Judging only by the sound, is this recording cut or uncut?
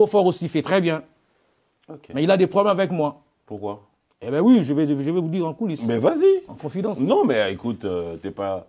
uncut